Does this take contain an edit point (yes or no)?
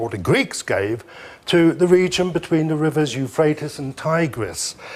yes